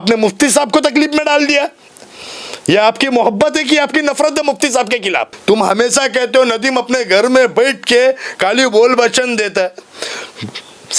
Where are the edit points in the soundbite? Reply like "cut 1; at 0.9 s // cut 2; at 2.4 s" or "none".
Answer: cut 1; at 5.3 s